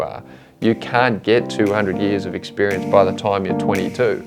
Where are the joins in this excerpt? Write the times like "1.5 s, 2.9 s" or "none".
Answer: none